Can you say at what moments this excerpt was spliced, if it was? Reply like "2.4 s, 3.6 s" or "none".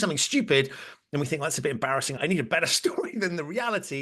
2.2 s